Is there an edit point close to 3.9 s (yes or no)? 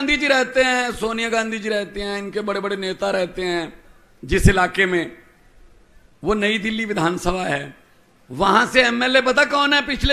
no